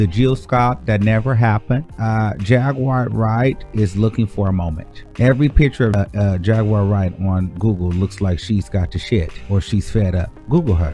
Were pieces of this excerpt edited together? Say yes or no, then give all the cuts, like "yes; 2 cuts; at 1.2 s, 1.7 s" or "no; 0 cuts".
yes; 2 cuts; at 2.0 s, 5.9 s